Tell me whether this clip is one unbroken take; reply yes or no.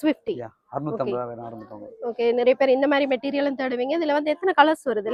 yes